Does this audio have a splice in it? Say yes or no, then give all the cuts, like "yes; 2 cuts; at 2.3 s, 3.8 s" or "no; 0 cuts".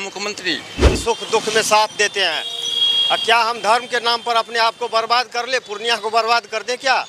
yes; 1 cut; at 1.0 s